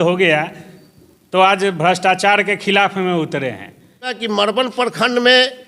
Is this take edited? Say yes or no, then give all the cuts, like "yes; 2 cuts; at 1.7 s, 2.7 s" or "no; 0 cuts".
yes; 1 cut; at 4.2 s